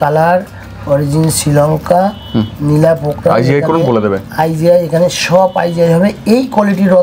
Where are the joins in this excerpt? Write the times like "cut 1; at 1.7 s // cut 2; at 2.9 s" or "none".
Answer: none